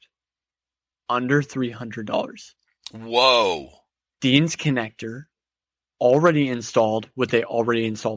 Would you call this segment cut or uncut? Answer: uncut